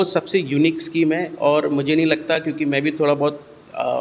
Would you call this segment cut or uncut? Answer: uncut